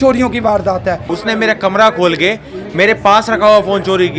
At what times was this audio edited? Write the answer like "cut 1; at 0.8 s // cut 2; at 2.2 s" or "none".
cut 1; at 1.1 s

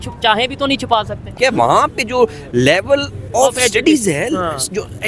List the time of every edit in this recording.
cut 1; at 1.4 s

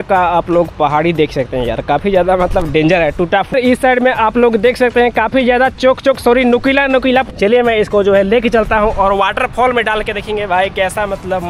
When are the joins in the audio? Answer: cut 1; at 3.5 s // cut 2; at 7.3 s

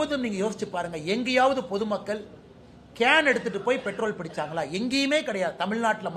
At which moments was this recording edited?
none

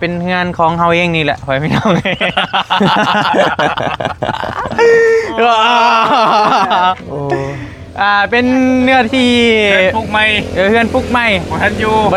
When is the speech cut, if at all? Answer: none

